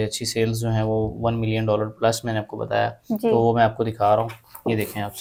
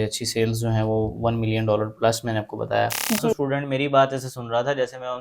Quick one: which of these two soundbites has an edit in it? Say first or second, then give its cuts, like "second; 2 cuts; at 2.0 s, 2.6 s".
second; 1 cut; at 3.3 s